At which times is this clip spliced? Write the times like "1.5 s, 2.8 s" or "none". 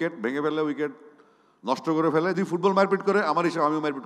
2.4 s